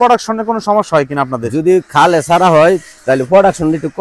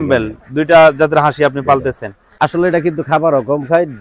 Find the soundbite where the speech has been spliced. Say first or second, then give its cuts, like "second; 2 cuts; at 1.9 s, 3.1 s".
second; 1 cut; at 2.1 s